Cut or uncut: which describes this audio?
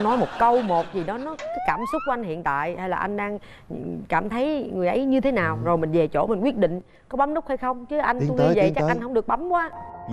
uncut